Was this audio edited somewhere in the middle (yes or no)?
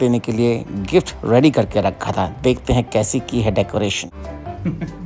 yes